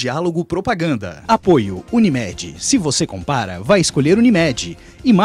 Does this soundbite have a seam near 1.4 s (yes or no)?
yes